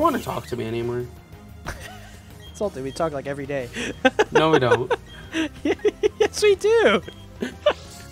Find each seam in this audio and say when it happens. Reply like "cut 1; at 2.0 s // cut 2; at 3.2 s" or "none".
none